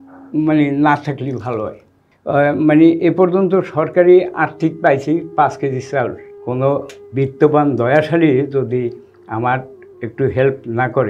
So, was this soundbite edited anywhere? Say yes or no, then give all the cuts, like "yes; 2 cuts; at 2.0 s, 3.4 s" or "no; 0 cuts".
yes; 2 cuts; at 2.1 s, 6.3 s